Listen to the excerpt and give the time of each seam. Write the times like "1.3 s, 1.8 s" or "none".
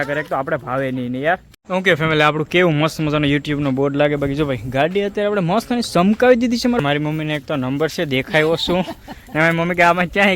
1.4 s, 6.8 s